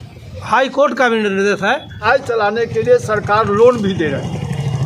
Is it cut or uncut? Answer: cut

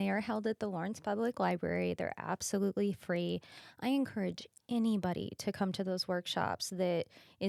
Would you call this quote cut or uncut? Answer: uncut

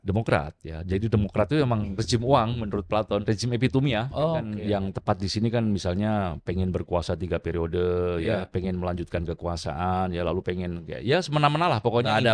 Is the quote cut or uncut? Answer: cut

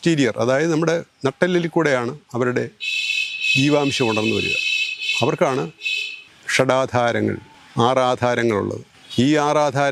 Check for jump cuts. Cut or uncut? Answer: uncut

